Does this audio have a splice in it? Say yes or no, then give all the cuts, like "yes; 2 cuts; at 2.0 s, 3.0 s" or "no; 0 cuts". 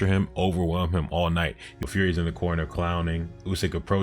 yes; 1 cut; at 1.7 s